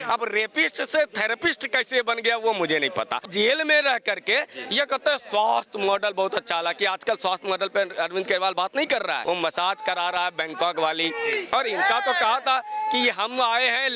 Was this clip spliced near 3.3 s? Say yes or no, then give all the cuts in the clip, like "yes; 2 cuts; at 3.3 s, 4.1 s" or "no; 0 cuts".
yes; 2 cuts; at 3.3 s, 9.2 s